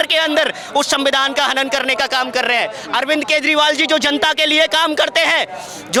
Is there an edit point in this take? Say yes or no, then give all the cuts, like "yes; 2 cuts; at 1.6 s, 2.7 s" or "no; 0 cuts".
no; 0 cuts